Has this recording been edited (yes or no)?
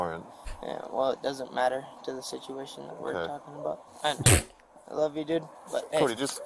no